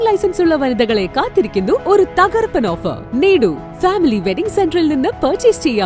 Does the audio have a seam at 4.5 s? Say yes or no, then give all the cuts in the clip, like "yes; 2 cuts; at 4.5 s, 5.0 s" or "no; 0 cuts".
no; 2 cuts; at 1.8 s, 3.0 s